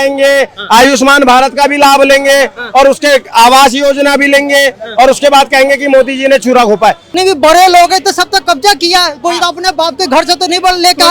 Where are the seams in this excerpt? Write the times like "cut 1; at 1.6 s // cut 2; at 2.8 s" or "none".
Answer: cut 1; at 7.1 s